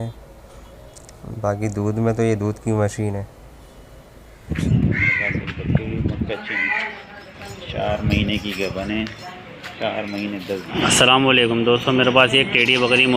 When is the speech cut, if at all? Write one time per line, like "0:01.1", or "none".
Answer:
0:04.6
0:10.7